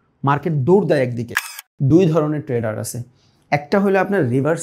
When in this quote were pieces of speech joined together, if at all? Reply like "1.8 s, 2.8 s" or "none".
1.5 s